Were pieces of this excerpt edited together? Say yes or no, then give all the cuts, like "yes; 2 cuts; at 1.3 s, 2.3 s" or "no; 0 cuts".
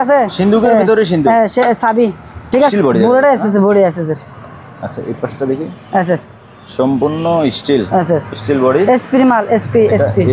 yes; 1 cut; at 2.7 s